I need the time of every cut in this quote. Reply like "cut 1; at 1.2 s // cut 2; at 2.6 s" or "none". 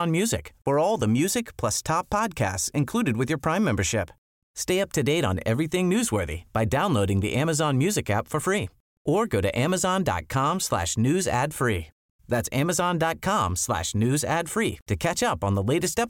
none